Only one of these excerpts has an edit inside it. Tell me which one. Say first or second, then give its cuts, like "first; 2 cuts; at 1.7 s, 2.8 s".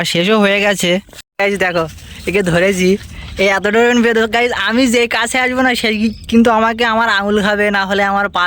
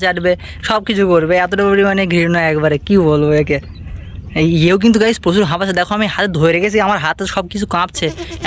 first; 1 cut; at 1.1 s